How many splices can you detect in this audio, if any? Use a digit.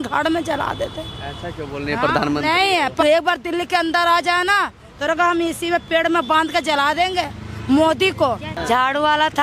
2